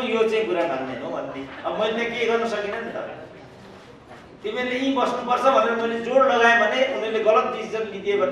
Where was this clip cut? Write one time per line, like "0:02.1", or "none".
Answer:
none